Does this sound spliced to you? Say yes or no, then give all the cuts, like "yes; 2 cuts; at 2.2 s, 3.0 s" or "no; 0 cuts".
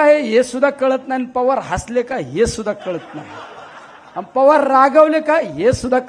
no; 0 cuts